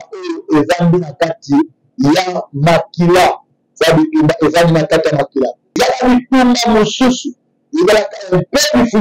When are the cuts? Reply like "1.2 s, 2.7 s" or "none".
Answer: 5.8 s